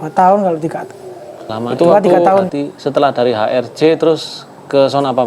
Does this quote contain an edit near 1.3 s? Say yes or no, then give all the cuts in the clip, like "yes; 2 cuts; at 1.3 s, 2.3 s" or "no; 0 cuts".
no; 1 cut; at 2.5 s